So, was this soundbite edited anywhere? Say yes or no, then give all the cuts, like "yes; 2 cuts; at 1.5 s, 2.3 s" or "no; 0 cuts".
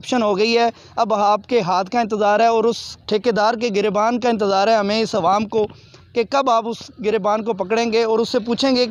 no; 0 cuts